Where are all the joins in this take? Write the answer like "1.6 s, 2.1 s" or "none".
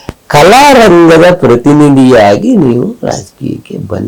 none